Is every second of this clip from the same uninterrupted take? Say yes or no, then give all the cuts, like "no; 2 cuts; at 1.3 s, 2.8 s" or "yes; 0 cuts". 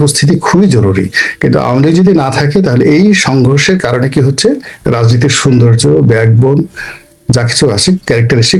yes; 0 cuts